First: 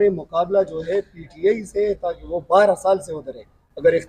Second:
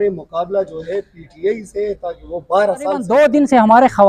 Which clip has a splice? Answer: second; 1 cut; at 3.1 s

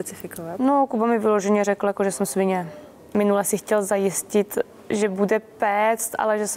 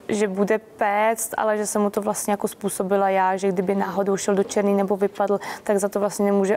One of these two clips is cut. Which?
first; 1 cut; at 3.1 s

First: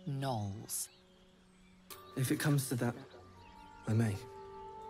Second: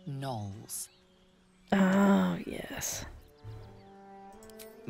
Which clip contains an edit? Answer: first; 1 cut; at 1.7 s

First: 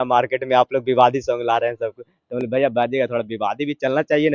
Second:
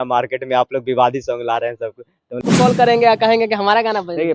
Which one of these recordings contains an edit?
second; 1 cut; at 2.4 s

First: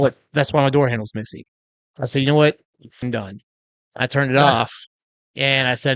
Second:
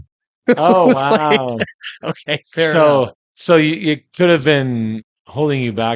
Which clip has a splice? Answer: first; 1 cut; at 3.0 s

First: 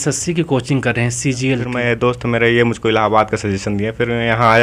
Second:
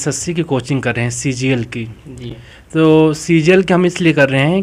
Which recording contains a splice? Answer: first; 1 cut; at 1.7 s

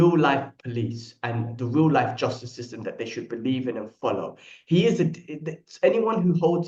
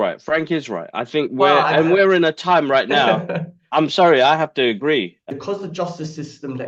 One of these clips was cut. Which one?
second; 1 cut; at 5.2 s

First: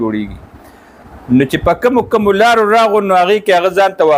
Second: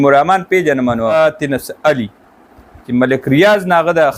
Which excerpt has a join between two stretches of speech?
second; 1 cut; at 1.1 s

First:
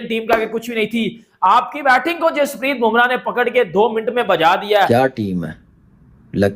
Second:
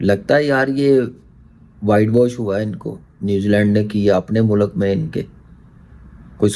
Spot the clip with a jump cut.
first; 1 cut; at 4.9 s

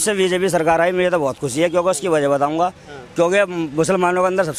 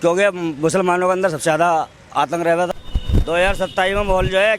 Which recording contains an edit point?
second; 1 cut; at 2.7 s

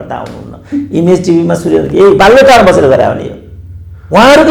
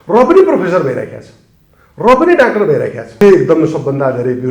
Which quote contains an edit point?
second; 1 cut; at 3.2 s

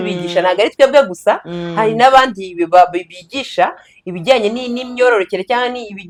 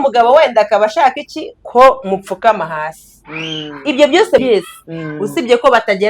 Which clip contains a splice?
second; 1 cut; at 4.4 s

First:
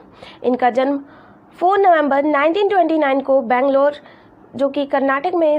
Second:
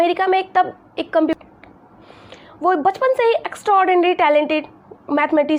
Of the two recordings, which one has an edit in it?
second; 1 cut; at 1.3 s

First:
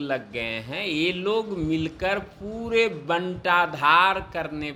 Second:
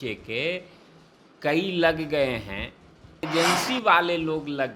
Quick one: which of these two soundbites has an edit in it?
second; 1 cut; at 3.3 s

